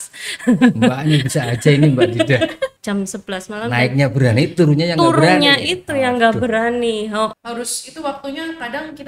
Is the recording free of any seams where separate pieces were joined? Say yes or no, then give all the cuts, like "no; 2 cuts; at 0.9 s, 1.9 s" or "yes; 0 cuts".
no; 2 cuts; at 2.8 s, 7.3 s